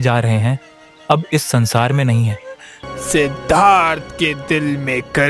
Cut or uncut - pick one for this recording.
cut